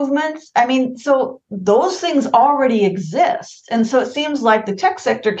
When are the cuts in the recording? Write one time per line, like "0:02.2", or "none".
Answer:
none